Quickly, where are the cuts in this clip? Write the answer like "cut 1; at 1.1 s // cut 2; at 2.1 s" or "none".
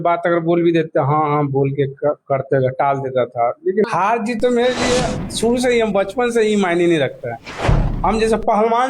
cut 1; at 3.9 s

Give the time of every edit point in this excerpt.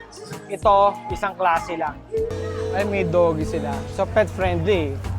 cut 1; at 2.3 s

